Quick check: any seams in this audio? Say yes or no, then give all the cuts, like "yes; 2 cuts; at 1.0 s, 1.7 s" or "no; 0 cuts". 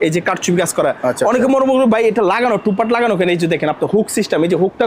no; 0 cuts